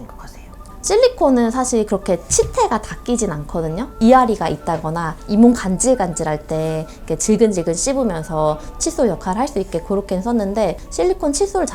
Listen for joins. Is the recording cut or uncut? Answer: cut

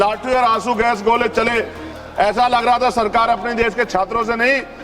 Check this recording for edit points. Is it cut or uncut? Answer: cut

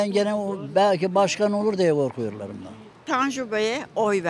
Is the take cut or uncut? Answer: uncut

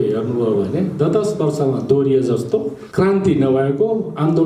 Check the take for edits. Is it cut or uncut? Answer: cut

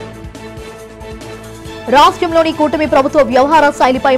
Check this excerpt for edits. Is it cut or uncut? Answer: cut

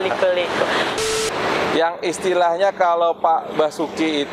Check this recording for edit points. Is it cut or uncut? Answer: cut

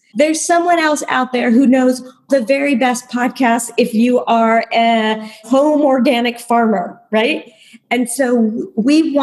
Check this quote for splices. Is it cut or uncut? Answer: cut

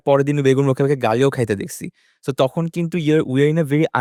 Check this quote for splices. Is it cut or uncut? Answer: uncut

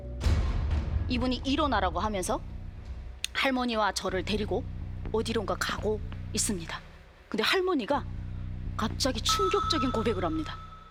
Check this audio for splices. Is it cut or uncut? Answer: uncut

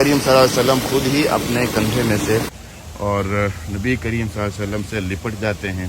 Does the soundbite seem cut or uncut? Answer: cut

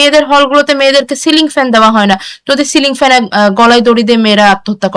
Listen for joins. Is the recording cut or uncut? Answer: uncut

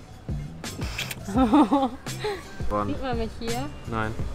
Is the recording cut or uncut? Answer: cut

